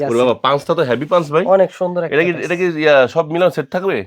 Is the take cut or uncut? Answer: uncut